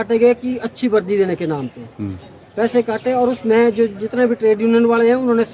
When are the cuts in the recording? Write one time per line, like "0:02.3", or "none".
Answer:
none